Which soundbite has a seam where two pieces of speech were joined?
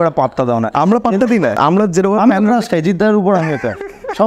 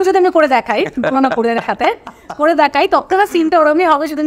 first; 1 cut; at 1.6 s

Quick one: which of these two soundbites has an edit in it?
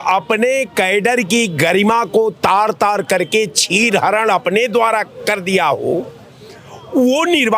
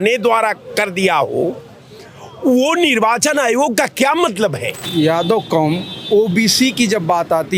second; 1 cut; at 4.8 s

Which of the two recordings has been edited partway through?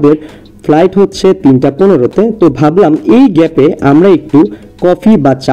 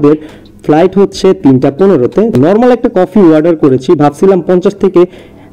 second; 1 cut; at 2.3 s

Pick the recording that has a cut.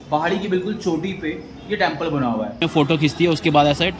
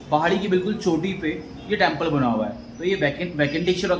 first; 1 cut; at 2.6 s

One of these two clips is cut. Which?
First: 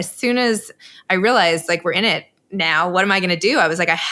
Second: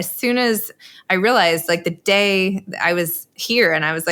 first; 1 cut; at 1.6 s

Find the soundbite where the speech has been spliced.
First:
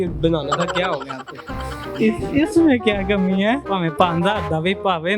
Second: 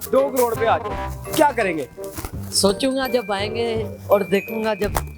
first; 1 cut; at 3.7 s

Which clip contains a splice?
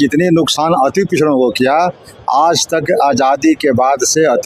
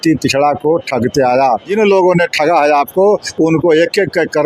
second; 1 cut; at 1.7 s

